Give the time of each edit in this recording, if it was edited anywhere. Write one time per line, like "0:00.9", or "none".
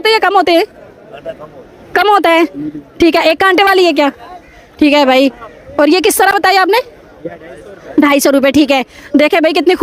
none